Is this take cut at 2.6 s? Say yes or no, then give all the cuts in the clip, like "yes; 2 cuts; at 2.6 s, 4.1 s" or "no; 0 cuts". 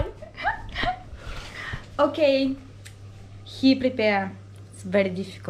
no; 0 cuts